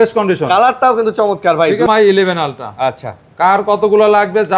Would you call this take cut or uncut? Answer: cut